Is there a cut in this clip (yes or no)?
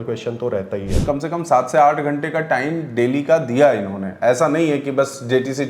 yes